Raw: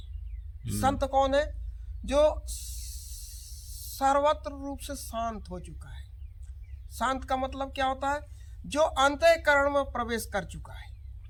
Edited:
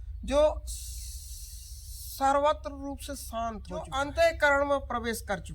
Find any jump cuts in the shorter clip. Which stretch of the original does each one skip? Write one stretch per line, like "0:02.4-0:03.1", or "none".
0:05.7-0:09.0